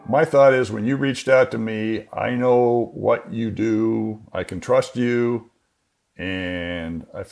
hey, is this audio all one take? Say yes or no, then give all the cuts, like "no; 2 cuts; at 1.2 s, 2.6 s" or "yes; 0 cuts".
yes; 0 cuts